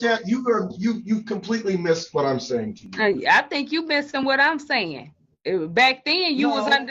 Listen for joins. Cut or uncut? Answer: uncut